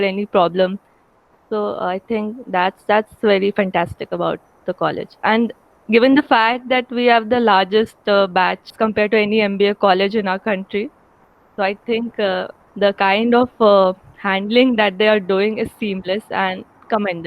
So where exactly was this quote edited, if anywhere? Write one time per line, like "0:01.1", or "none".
0:08.7